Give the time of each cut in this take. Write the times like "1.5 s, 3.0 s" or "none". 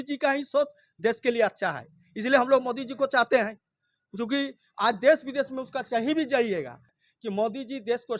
6.9 s